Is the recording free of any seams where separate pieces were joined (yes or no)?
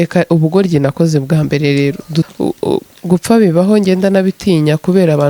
no